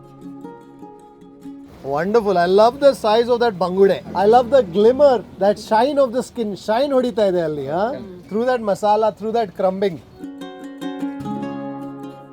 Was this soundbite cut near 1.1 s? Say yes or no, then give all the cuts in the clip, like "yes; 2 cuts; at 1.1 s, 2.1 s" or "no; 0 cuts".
no; 0 cuts